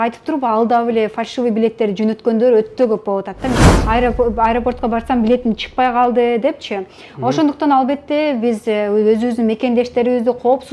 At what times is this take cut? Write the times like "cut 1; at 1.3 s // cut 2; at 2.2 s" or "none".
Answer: cut 1; at 3.6 s